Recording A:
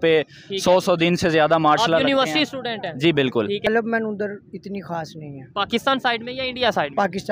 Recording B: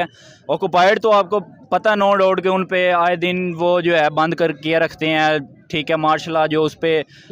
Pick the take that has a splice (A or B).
A